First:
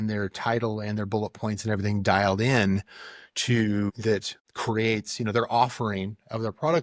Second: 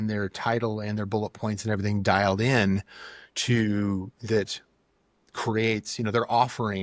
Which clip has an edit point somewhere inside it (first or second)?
first